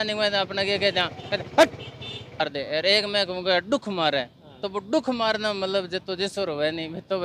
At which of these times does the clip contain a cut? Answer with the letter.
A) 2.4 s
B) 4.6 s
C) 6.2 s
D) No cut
A